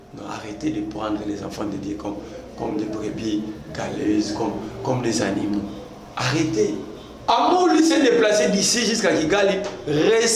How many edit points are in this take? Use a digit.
1